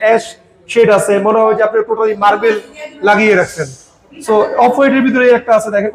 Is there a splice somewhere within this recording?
no; 0 cuts

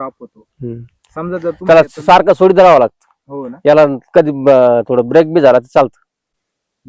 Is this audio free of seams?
yes; 0 cuts

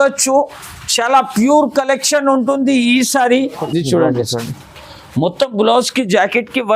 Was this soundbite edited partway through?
yes; 1 cut; at 3.6 s

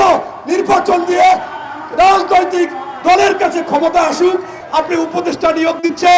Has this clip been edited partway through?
yes; 1 cut; at 4.6 s

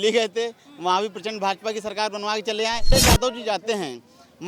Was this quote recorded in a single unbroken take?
no; 1 cut; at 2.9 s

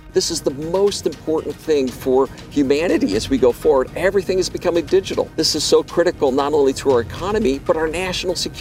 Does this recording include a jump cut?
yes; 1 cut; at 5.3 s

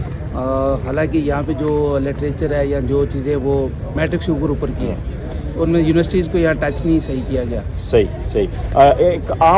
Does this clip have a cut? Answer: no; 0 cuts

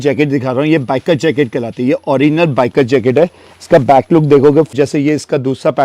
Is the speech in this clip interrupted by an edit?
yes; 1 cut; at 4.7 s

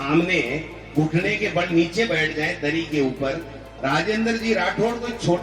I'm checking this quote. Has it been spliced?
yes; 1 cut; at 3.7 s

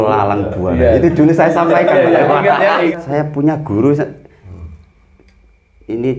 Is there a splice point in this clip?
yes; 1 cut; at 2.9 s

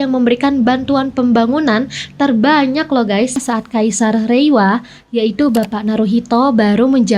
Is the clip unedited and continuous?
no; 1 cut; at 3.4 s

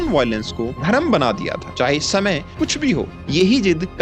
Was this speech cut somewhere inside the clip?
no; 0 cuts

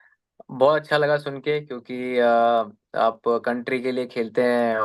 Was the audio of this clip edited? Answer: no; 0 cuts

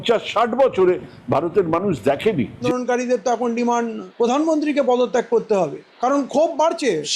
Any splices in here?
yes; 1 cut; at 2.6 s

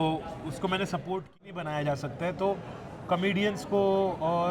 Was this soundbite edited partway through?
yes; 1 cut; at 1.4 s

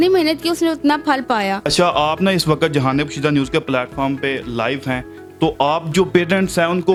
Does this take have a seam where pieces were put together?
no; 0 cuts

